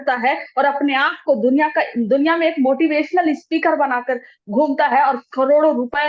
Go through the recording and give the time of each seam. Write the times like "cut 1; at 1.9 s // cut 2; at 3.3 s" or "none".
none